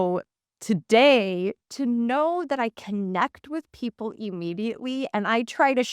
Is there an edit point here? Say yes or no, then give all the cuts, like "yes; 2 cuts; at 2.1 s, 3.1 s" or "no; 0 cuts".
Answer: yes; 1 cut; at 1.6 s